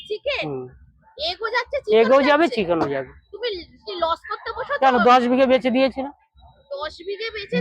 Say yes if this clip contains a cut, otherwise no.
no